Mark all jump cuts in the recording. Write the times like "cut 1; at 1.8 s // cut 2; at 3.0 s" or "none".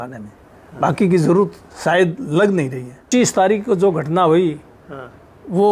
cut 1; at 3.1 s